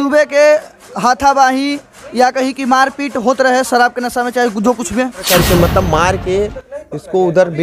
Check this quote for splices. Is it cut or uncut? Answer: cut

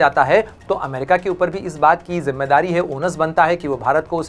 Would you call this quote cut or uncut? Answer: uncut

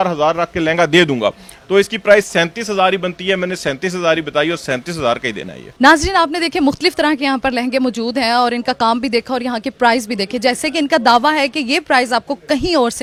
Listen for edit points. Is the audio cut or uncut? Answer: uncut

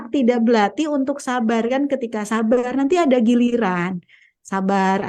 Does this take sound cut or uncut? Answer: uncut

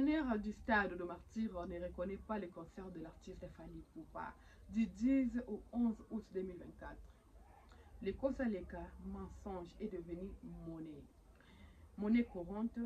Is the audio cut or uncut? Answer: uncut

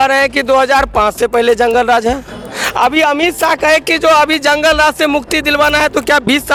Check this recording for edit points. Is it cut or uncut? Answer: uncut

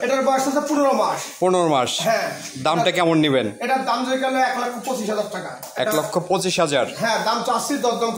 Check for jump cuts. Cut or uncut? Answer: uncut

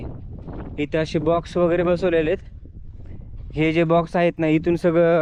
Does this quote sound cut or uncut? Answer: uncut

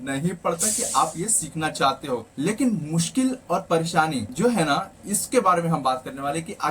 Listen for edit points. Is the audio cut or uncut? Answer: cut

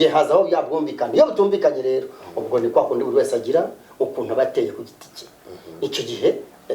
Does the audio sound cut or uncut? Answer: uncut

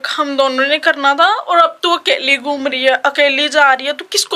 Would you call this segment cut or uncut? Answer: uncut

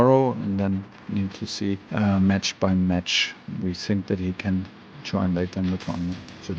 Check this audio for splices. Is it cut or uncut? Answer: cut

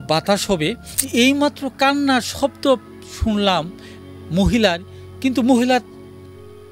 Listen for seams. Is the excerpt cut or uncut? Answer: cut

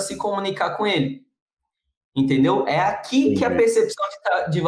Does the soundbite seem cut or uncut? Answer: uncut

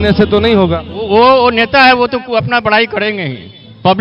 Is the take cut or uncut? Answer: uncut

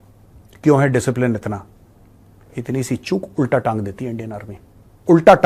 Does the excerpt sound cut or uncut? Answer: uncut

